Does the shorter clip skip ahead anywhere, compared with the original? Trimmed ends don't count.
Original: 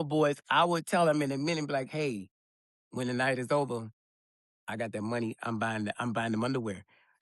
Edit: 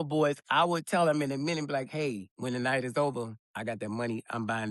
yes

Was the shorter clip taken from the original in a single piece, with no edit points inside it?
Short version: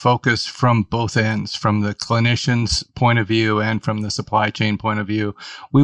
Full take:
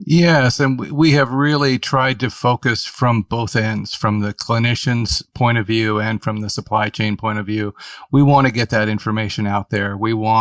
yes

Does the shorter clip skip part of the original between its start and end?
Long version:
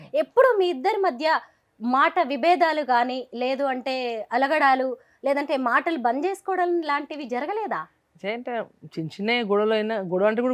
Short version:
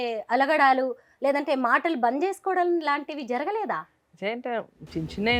no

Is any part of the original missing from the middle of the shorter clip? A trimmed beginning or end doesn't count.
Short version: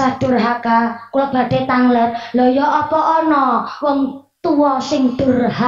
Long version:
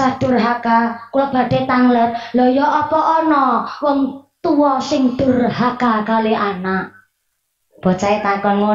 no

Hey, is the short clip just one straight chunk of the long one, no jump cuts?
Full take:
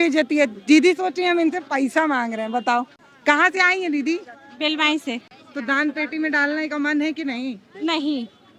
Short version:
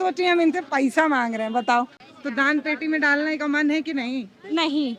no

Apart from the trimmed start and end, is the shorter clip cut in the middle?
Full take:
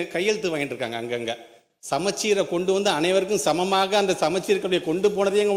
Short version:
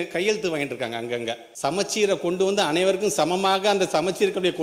yes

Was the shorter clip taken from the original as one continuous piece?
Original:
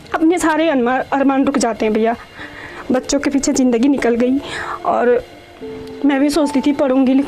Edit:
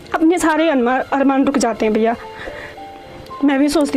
no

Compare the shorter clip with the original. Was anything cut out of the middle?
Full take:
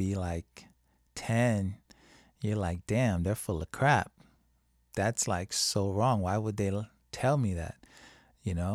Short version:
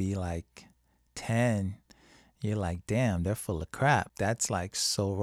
yes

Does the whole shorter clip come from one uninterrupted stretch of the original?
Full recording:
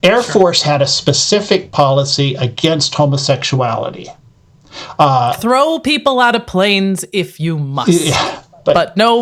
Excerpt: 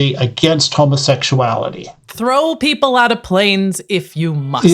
no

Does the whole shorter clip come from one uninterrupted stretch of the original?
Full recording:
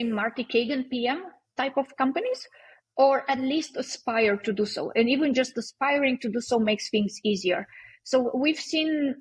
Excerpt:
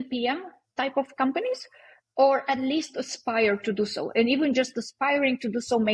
yes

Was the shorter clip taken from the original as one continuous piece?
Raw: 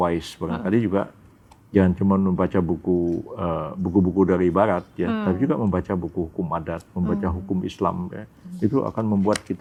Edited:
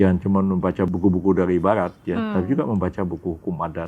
no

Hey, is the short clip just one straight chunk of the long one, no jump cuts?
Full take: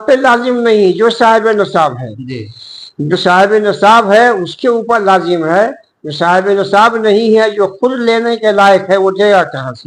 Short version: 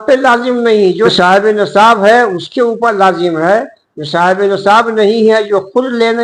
no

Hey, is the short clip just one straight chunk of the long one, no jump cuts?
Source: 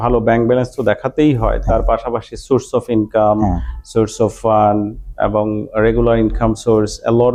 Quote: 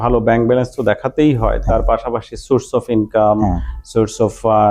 yes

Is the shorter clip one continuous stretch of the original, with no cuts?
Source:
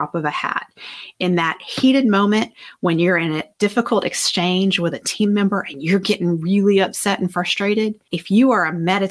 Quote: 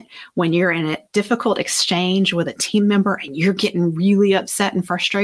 yes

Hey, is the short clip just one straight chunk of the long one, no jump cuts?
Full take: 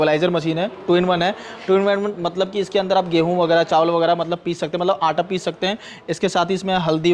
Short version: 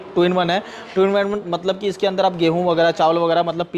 yes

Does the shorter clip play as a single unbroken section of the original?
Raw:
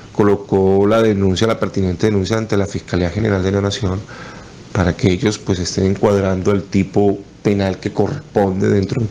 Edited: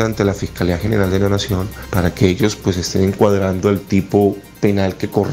no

